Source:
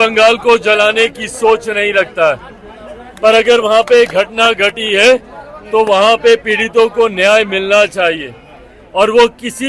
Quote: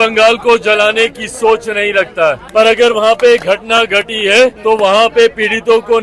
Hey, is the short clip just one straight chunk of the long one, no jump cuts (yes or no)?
no